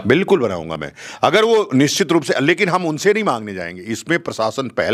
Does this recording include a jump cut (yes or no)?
no